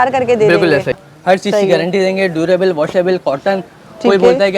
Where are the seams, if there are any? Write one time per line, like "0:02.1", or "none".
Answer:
0:01.0